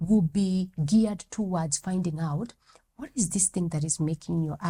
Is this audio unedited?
yes; 0 cuts

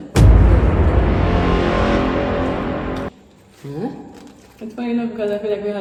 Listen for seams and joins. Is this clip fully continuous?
yes; 0 cuts

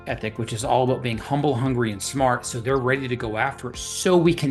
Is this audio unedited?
yes; 0 cuts

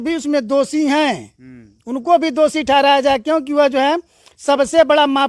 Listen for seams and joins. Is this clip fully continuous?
yes; 0 cuts

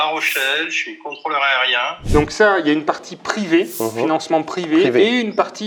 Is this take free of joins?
no; 1 cut; at 2.0 s

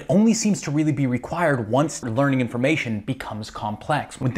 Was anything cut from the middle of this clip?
no; 0 cuts

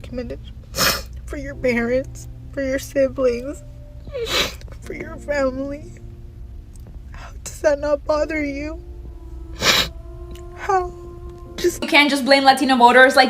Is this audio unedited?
no; 1 cut; at 11.9 s

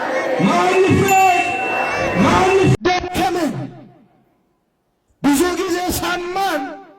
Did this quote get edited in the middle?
yes; 1 cut; at 2.7 s

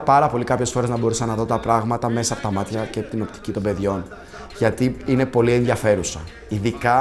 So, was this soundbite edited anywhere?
no; 0 cuts

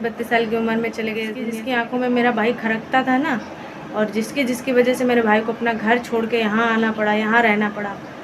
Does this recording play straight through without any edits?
no; 1 cut; at 1.6 s

